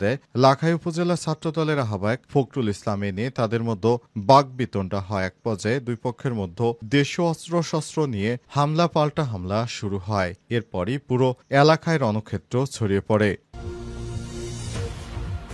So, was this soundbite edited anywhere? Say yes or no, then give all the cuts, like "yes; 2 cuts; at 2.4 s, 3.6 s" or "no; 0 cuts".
yes; 1 cut; at 13.4 s